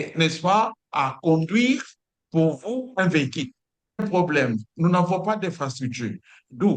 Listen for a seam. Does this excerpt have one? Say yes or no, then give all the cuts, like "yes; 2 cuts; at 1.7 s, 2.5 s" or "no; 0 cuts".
yes; 1 cut; at 4.0 s